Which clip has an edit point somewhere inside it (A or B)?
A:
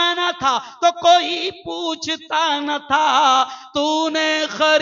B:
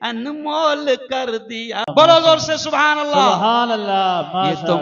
B